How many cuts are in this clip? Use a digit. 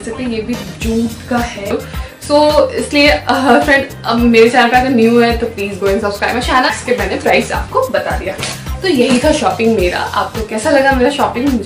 2